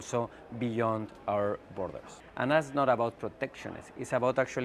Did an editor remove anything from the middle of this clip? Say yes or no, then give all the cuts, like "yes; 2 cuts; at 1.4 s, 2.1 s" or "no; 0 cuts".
yes; 1 cut; at 2.1 s